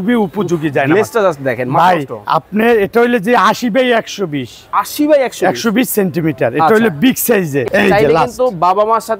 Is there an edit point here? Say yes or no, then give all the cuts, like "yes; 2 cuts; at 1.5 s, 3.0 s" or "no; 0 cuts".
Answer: yes; 1 cut; at 7.7 s